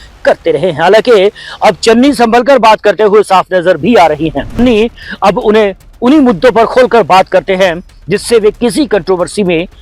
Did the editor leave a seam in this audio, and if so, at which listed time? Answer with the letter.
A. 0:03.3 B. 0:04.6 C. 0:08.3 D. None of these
B